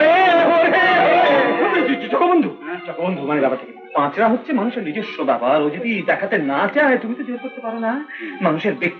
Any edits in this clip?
no; 0 cuts

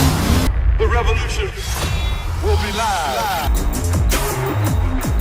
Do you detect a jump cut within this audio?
no; 0 cuts

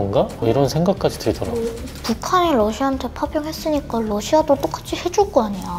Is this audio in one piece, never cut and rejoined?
yes; 0 cuts

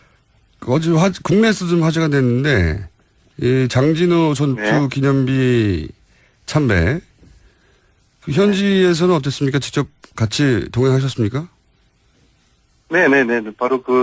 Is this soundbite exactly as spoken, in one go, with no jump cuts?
no; 1 cut; at 3.9 s

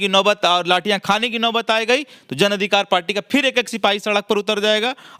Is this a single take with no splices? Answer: yes; 0 cuts

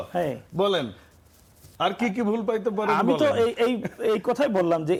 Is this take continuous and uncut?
yes; 0 cuts

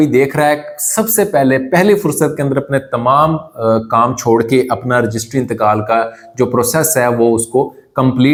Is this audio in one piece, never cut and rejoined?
yes; 0 cuts

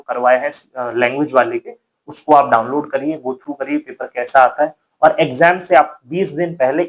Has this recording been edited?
no; 0 cuts

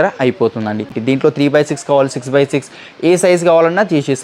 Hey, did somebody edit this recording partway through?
yes; 1 cut; at 0.9 s

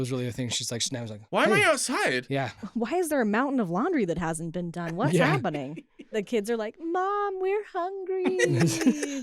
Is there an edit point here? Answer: yes; 3 cuts; at 1.2 s, 2.7 s, 6.2 s

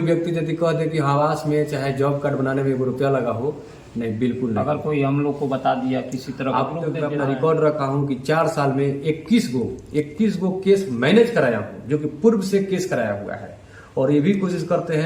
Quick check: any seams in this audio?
yes; 1 cut; at 7.0 s

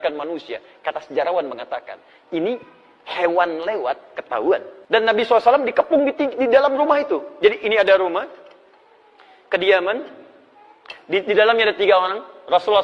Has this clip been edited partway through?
yes; 1 cut; at 4.7 s

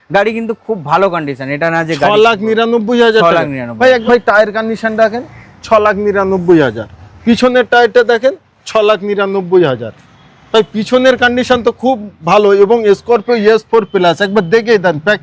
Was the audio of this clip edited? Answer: yes; 1 cut; at 4.0 s

